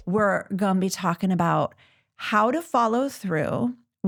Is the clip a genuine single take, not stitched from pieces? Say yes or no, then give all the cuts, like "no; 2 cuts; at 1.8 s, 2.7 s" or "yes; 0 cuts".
yes; 0 cuts